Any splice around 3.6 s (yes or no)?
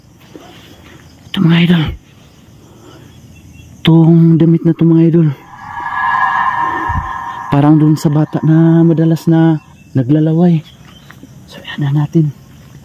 no